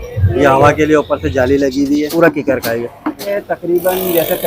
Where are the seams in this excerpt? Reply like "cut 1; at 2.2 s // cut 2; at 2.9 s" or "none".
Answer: cut 1; at 2.1 s // cut 2; at 3.3 s